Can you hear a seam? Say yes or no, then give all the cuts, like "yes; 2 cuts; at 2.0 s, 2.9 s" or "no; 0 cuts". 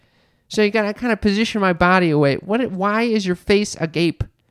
no; 0 cuts